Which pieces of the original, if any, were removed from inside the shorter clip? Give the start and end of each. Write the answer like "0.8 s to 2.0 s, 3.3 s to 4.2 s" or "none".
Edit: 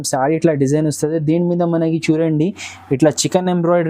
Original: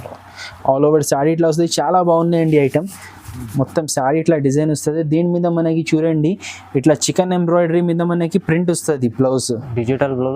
none